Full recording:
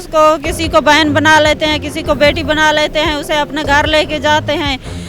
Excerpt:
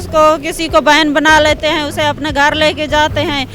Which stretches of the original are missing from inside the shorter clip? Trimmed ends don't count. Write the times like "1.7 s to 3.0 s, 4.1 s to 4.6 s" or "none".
1.6 s to 2.9 s